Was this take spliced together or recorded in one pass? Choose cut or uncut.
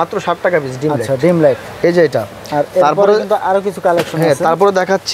uncut